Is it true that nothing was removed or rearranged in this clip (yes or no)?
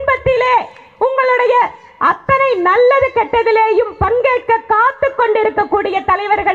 yes